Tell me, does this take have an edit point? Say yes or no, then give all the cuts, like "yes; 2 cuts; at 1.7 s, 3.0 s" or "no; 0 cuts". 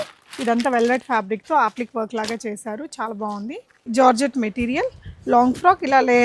yes; 1 cut; at 3.8 s